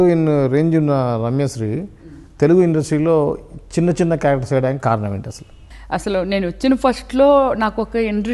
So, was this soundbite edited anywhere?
no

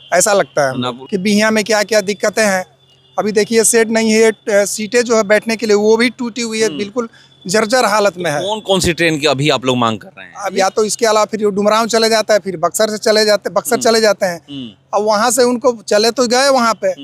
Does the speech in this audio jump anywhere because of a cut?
yes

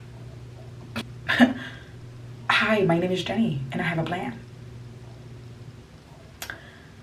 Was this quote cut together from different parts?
yes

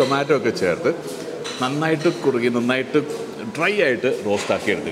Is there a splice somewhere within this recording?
no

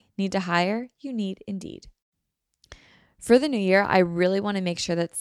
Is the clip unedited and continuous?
no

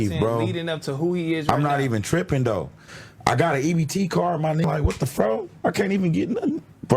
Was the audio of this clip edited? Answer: yes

